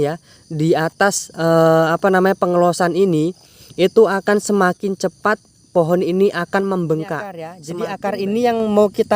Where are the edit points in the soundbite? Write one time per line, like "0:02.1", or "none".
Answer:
0:07.6